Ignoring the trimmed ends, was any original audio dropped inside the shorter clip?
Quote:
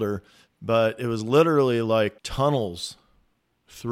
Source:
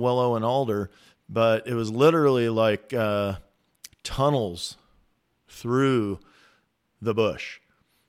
yes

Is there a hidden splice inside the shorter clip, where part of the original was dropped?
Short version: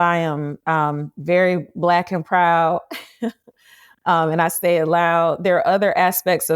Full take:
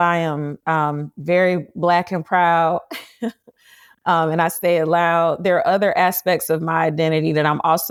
no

